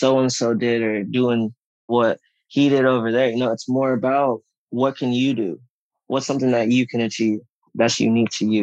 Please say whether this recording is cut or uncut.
cut